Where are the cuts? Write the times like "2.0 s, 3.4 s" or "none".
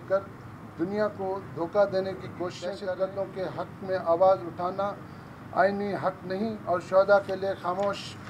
2.7 s